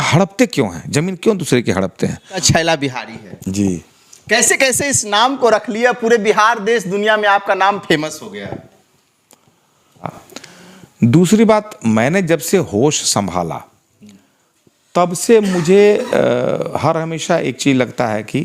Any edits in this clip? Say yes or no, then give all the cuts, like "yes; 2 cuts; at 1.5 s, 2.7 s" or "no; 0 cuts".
yes; 2 cuts; at 2.4 s, 10.1 s